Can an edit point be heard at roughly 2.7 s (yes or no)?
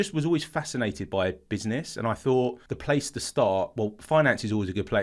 yes